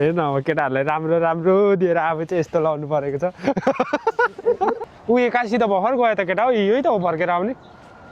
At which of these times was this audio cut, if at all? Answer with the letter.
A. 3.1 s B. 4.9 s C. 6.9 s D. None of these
B